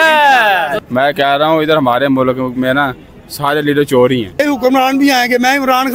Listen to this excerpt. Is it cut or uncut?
cut